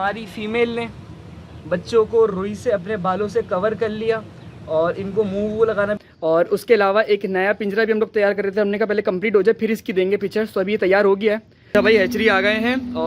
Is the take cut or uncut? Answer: cut